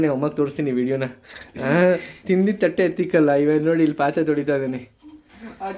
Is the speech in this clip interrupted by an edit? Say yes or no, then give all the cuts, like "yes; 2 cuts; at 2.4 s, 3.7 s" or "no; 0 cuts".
no; 0 cuts